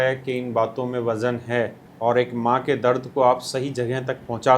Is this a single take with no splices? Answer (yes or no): no